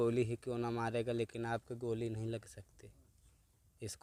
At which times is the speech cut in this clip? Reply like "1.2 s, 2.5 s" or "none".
none